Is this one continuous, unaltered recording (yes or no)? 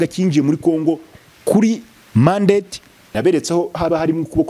no